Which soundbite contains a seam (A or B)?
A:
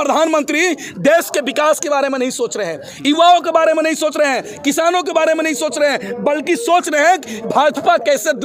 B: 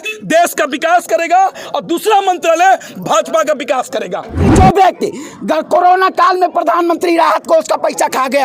B